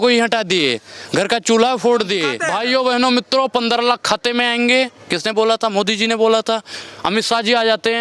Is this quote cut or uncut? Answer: cut